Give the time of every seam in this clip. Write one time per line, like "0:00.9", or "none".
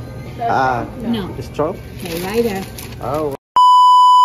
0:03.3